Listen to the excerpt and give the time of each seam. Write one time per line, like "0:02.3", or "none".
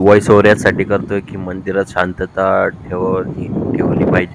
none